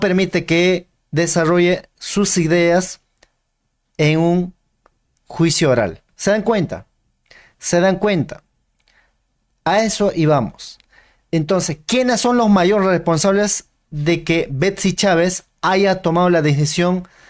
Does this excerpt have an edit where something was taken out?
no; 0 cuts

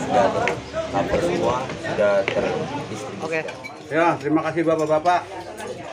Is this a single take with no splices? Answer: no; 1 cut; at 3.6 s

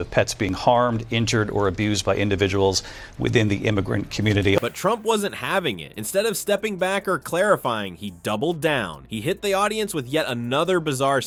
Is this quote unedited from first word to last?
yes; 0 cuts

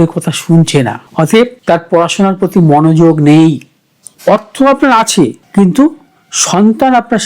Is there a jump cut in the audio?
yes; 1 cut; at 4.1 s

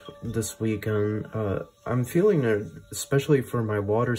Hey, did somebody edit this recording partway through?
no; 0 cuts

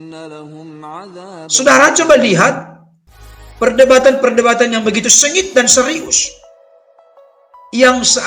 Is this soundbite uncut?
no; 1 cut; at 1.4 s

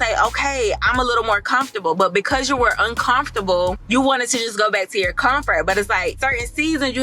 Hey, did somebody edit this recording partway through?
no; 0 cuts

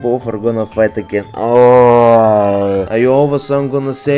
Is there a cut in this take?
no; 0 cuts

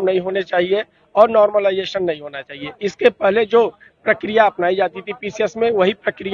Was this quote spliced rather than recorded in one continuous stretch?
no; 0 cuts

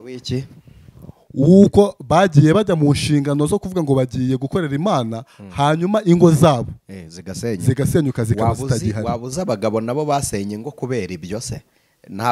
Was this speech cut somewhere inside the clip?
no; 0 cuts

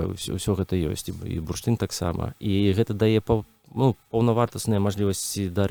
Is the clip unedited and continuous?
yes; 0 cuts

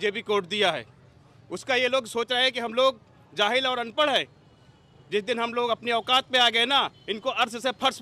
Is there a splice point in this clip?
no; 0 cuts

